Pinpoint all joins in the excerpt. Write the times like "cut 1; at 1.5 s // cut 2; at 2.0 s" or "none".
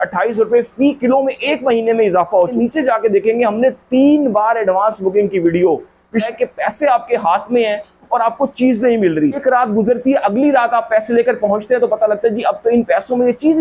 cut 1; at 2.6 s // cut 2; at 6.3 s // cut 3; at 9.4 s